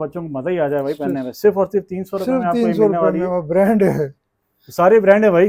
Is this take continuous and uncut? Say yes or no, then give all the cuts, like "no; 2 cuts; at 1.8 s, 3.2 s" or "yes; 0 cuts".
yes; 0 cuts